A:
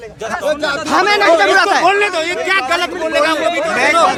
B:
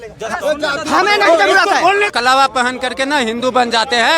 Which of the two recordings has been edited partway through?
B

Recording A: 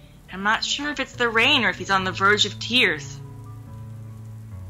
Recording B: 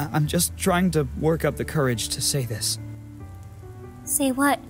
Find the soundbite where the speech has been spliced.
B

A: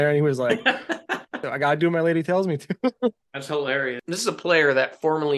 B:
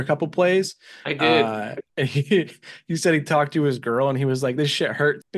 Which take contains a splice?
A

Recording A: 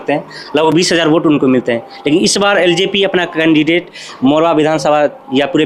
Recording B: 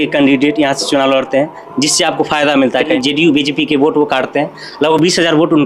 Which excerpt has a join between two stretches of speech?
B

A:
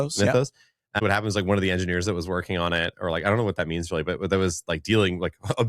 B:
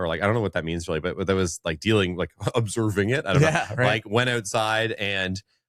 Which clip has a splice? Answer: A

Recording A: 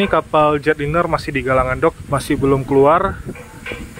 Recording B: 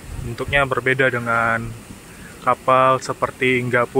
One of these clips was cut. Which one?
A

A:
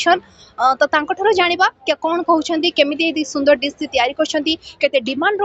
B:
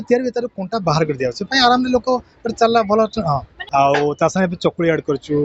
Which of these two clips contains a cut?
B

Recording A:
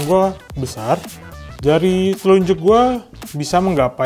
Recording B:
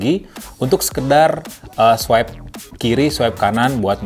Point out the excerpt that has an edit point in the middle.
A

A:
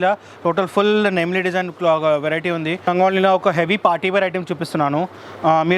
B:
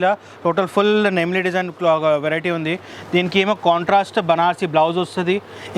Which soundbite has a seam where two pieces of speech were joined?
A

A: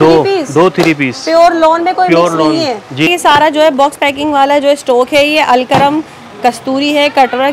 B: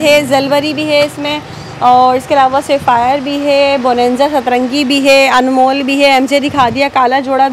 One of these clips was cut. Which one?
A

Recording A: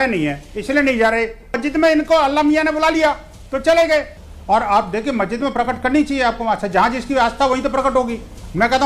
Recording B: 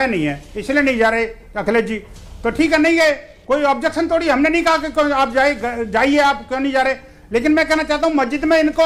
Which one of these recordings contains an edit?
A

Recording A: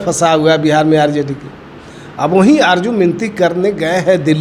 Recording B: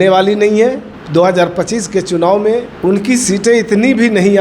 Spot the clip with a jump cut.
B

